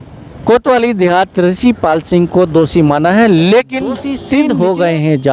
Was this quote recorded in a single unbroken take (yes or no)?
no